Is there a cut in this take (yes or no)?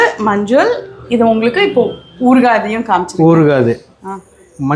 no